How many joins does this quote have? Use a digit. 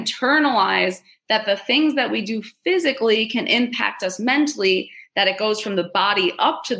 0